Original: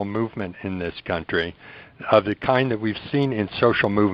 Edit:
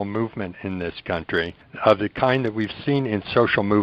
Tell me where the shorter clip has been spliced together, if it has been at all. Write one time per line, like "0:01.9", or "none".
0:01.6